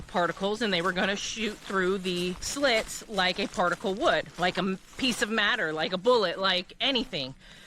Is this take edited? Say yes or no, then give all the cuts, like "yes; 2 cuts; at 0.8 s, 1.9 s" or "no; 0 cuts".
yes; 2 cuts; at 2.4 s, 4.3 s